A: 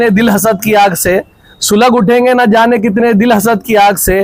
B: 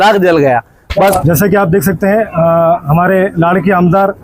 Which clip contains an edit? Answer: B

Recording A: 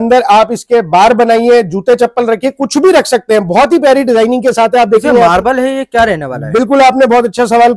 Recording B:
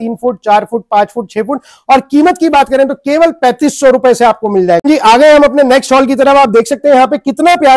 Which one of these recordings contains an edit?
B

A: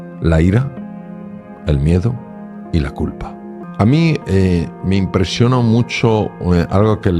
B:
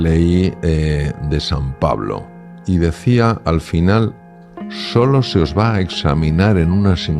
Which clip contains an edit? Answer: A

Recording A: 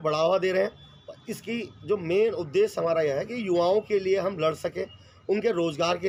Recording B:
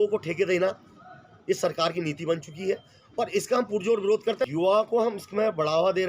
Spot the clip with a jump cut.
B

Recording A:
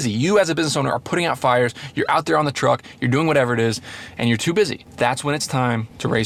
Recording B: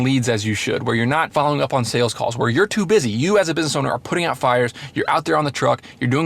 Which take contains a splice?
B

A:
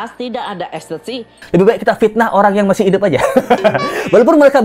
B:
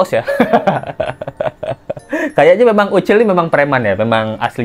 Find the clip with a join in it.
A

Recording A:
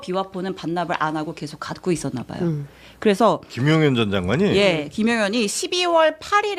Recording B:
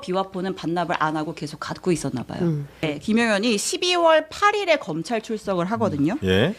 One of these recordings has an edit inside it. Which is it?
B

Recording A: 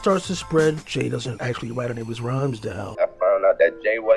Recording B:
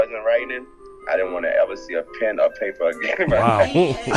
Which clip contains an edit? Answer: A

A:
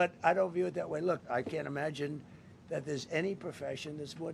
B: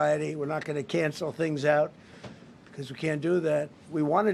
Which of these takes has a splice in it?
A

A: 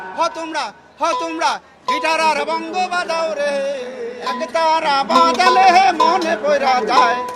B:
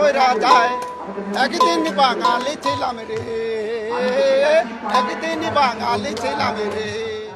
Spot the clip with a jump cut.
A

